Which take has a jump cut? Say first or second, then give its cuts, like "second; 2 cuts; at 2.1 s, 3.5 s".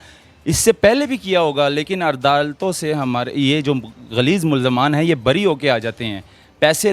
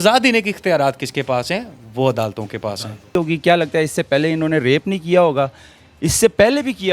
second; 1 cut; at 3.1 s